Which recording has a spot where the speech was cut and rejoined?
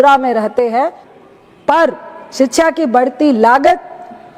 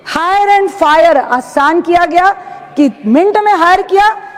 first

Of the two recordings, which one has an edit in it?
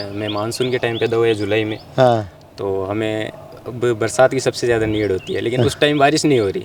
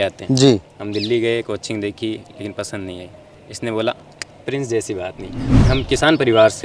second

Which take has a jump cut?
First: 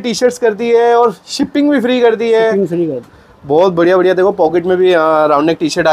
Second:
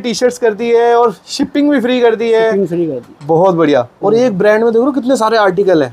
first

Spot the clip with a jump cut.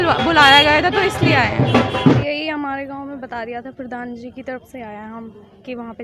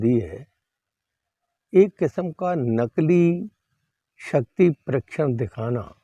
first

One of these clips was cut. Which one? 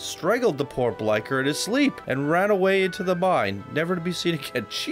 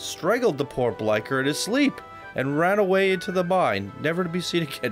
first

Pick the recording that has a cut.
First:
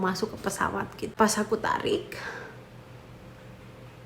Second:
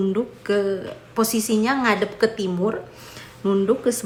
first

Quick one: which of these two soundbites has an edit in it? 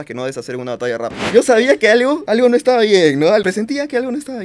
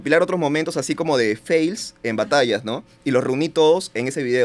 first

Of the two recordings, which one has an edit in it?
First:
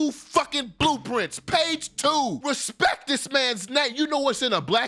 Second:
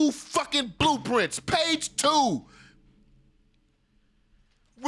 first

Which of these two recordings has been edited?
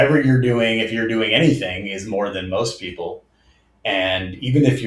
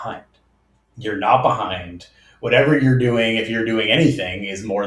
second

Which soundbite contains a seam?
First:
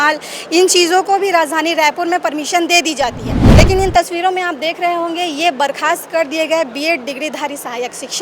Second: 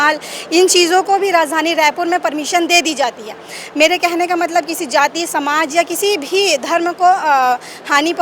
first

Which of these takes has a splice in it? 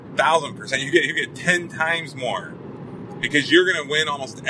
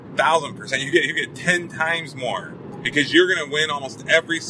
second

